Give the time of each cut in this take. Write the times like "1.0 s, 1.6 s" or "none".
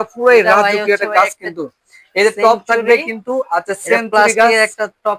none